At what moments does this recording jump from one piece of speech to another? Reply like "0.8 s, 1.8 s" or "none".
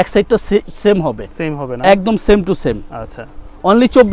none